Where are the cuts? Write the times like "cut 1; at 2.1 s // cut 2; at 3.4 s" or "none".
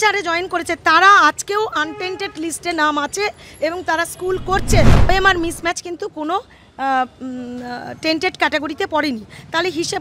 cut 1; at 5.1 s